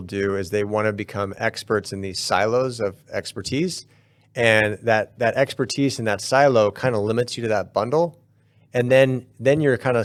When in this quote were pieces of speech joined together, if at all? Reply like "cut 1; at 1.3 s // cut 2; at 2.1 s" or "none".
none